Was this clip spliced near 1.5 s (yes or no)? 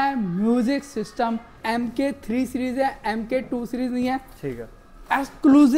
yes